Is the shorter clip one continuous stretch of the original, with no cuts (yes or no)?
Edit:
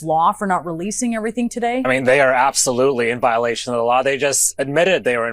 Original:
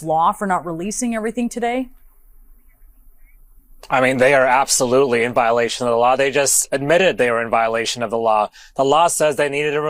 no